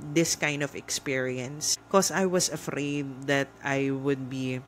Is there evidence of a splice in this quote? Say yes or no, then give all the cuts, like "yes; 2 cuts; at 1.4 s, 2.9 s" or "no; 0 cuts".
no; 0 cuts